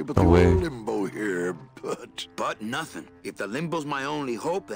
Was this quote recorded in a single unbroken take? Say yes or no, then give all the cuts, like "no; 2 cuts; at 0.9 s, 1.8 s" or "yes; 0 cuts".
yes; 0 cuts